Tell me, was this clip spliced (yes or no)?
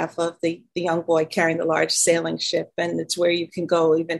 no